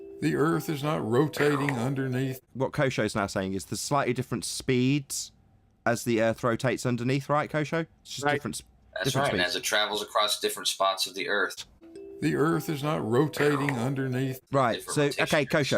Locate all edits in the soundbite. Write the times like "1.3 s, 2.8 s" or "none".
2.5 s, 11.5 s, 14.4 s